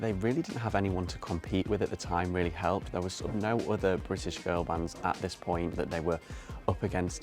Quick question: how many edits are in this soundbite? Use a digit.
0